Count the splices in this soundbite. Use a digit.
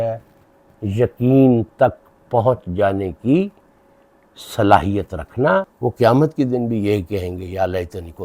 1